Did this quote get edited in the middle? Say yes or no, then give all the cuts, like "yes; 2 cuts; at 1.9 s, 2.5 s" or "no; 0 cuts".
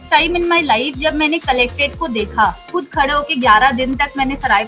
yes; 1 cut; at 2.6 s